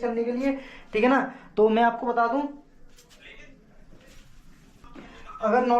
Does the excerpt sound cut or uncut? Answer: cut